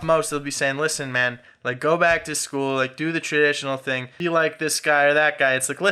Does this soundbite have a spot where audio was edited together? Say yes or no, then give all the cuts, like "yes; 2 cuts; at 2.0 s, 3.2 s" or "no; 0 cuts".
yes; 1 cut; at 4.1 s